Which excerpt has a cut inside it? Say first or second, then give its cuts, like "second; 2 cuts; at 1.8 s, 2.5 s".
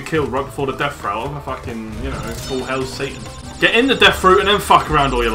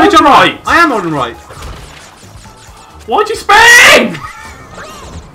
first; 1 cut; at 3.4 s